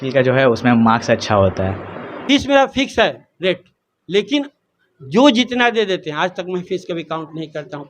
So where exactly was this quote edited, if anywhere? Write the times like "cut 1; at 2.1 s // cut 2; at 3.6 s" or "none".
cut 1; at 2.2 s